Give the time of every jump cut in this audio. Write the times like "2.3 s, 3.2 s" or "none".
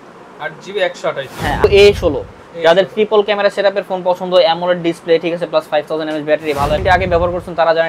1.6 s, 6.8 s